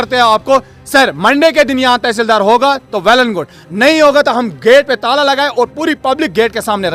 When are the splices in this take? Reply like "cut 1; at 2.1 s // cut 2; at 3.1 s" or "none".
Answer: none